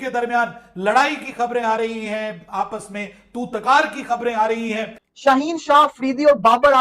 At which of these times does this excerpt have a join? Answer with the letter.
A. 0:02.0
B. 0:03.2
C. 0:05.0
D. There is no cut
C